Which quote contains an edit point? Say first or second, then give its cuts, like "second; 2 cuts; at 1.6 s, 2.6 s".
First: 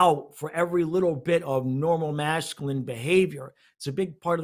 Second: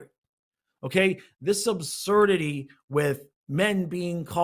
second; 1 cut; at 3.3 s